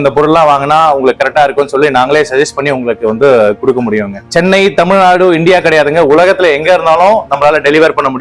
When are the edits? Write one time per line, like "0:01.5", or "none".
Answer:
0:04.2